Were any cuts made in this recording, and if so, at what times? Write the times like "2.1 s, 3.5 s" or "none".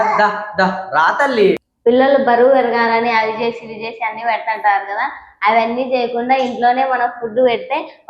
1.7 s